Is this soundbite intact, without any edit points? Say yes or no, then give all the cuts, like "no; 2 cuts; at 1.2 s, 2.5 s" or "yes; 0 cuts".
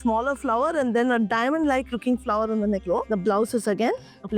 yes; 0 cuts